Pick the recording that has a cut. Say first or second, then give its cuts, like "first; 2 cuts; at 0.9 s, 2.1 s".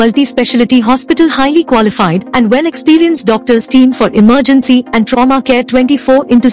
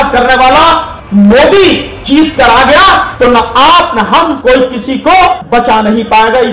second; 5 cuts; at 0.9 s, 1.9 s, 3.1 s, 4.4 s, 5.4 s